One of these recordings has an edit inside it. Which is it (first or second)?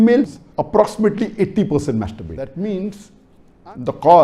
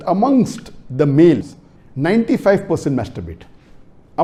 first